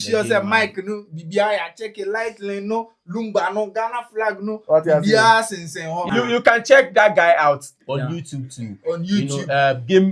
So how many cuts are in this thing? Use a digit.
1